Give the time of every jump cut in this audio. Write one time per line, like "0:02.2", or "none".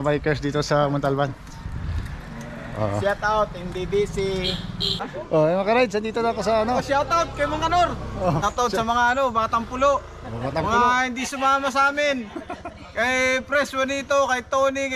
0:04.9
0:08.4